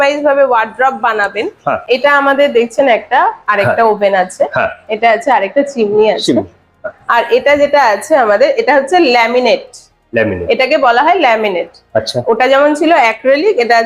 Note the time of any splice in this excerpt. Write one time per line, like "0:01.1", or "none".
0:01.8